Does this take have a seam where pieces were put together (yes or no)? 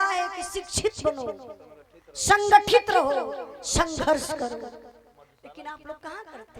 no